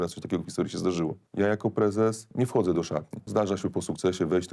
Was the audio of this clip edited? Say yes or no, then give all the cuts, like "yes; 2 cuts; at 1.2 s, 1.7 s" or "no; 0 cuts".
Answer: yes; 3 cuts; at 1.2 s, 2.2 s, 3.2 s